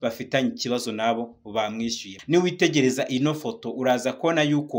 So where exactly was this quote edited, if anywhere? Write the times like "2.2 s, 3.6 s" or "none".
2.1 s